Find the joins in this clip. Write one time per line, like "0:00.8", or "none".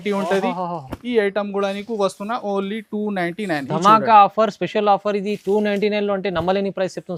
none